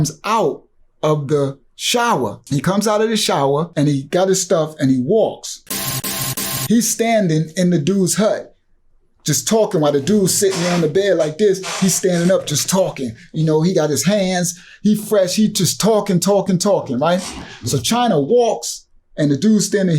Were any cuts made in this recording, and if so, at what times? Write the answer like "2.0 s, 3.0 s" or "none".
2.4 s, 3.7 s, 6.0 s